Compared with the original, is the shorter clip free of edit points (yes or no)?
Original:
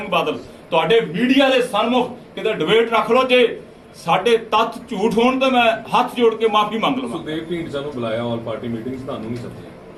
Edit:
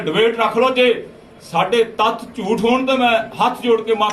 yes